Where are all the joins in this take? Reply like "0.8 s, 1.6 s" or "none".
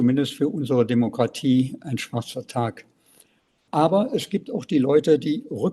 3.6 s